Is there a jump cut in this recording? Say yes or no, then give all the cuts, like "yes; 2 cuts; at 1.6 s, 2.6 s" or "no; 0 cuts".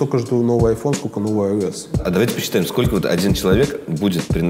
yes; 1 cut; at 2.0 s